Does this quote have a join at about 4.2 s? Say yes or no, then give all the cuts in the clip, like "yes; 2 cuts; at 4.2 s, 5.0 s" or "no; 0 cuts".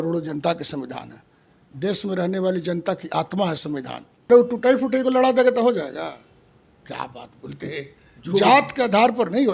yes; 1 cut; at 4.2 s